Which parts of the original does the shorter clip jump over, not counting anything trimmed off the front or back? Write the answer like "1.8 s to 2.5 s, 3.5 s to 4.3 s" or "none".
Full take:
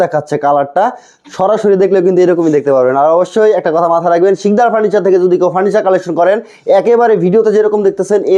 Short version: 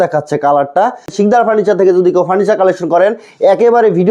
1.1 s to 4.4 s

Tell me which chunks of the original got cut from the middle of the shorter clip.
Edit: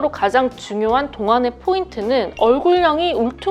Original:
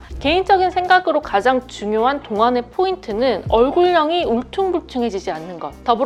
none

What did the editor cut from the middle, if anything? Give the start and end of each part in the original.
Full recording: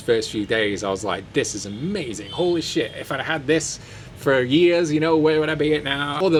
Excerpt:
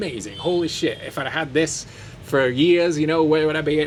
none

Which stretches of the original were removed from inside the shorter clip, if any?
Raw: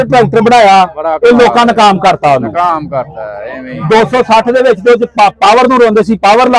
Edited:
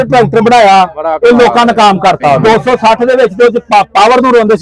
2.4 s to 3.9 s

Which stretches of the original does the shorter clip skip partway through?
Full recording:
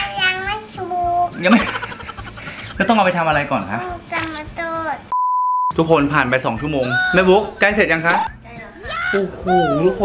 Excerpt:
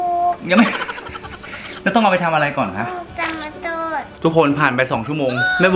5.1 s to 5.7 s

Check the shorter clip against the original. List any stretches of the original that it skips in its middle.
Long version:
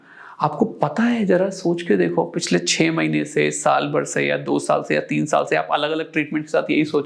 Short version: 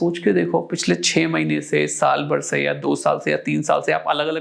none

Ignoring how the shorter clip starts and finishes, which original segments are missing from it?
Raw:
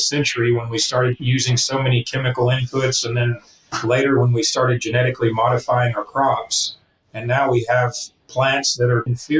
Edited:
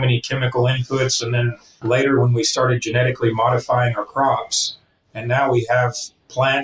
3.5 s to 3.6 s

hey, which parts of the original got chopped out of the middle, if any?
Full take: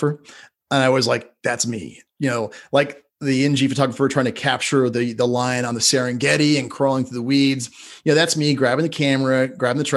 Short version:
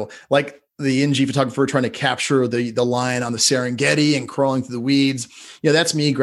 none

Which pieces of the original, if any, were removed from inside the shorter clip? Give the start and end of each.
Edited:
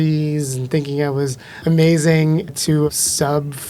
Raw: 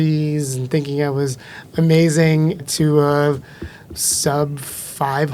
1.5 s to 1.6 s, 3.0 s to 3.9 s

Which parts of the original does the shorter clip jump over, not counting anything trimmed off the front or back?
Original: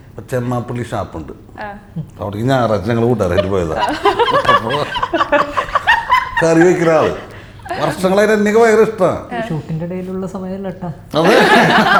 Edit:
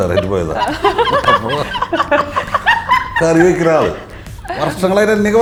none

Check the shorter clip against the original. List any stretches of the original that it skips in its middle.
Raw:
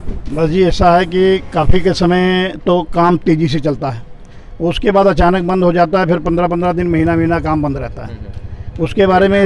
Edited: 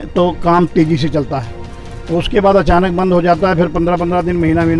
none

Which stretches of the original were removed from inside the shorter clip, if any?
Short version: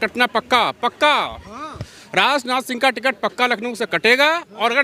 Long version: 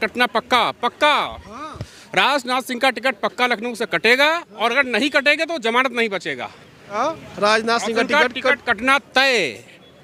none

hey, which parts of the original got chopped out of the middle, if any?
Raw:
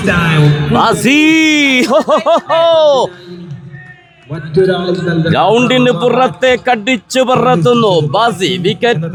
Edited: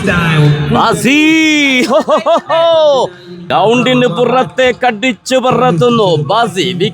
3.5 s to 5.3 s

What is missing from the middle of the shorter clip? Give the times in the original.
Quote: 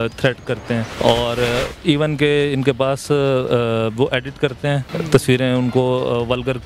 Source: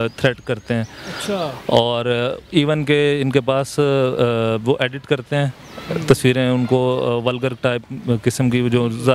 0.9 s to 1.6 s, 5.6 s to 5.9 s

